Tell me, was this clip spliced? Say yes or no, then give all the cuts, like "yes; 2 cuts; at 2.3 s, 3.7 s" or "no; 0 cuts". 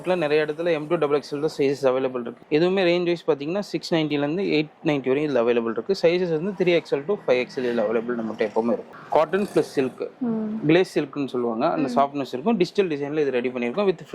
yes; 2 cuts; at 2.4 s, 8.9 s